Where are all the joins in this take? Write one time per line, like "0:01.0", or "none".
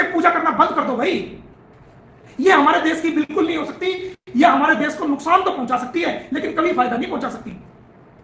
none